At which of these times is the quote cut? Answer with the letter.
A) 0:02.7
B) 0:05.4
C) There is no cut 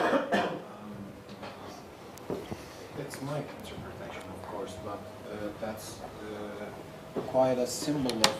C